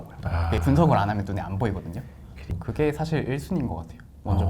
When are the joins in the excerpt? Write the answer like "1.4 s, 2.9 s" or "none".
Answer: 2.6 s